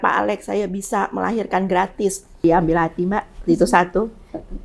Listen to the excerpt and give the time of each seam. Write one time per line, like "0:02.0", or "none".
0:02.4